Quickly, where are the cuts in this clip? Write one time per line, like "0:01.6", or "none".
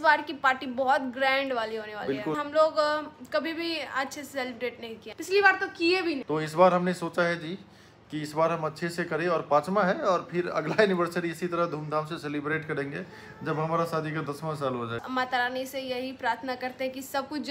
0:02.4
0:05.1
0:06.2
0:15.0